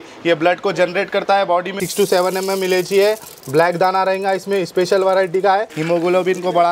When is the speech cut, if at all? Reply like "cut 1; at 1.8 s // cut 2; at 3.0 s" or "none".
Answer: cut 1; at 1.8 s // cut 2; at 5.7 s